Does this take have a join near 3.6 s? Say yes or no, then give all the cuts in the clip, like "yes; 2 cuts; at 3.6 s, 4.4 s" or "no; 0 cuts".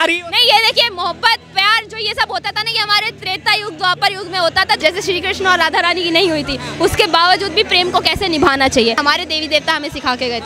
no; 2 cuts; at 4.8 s, 9.0 s